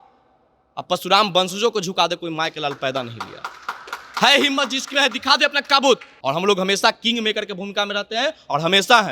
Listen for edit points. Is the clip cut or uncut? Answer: cut